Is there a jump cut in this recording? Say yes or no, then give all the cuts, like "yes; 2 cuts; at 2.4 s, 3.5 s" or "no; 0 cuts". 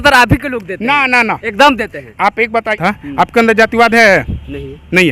yes; 1 cut; at 2.8 s